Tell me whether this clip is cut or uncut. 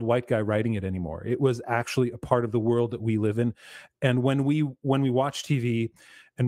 uncut